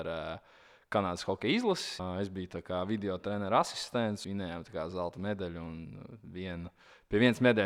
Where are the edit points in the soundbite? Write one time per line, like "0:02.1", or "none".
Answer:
0:02.0
0:04.2